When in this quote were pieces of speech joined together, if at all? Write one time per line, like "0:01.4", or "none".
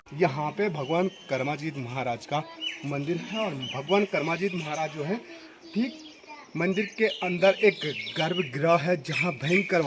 none